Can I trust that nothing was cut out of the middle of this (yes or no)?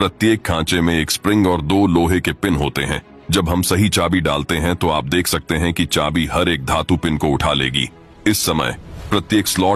yes